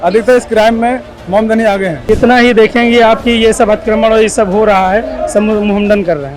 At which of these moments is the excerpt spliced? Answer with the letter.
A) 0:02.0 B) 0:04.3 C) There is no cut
A